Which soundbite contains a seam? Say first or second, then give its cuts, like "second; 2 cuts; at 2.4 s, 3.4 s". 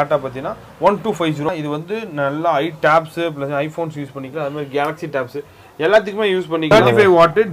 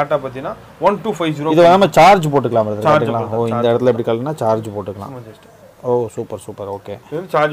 first; 2 cuts; at 1.5 s, 6.7 s